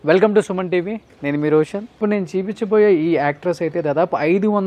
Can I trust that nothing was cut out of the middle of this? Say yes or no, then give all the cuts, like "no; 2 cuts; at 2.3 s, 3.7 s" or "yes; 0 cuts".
no; 1 cut; at 1.9 s